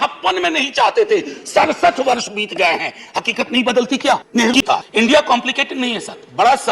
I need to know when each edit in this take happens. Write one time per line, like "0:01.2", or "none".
0:04.5